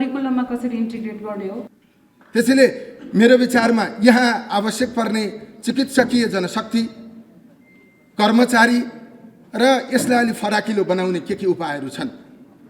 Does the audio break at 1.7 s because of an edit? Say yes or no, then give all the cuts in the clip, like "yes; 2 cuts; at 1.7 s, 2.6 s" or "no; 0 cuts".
yes; 1 cut; at 1.7 s